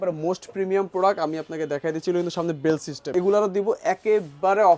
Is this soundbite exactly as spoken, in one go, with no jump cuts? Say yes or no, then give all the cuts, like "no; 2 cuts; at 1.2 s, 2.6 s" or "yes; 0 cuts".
no; 1 cut; at 3.1 s